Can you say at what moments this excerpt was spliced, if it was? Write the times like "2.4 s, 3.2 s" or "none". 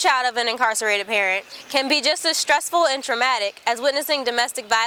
none